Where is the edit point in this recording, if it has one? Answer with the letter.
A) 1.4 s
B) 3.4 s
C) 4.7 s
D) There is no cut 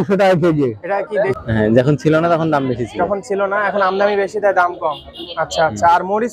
A